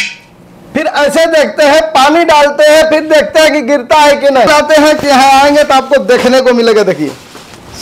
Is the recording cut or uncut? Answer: cut